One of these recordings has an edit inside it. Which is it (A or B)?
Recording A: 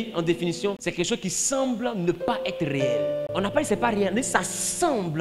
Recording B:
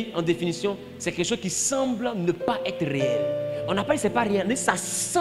A